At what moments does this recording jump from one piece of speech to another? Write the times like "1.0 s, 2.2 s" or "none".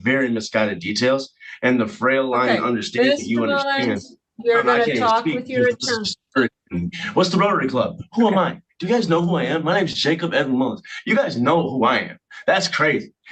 none